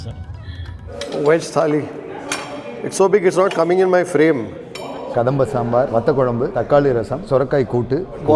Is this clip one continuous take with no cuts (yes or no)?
no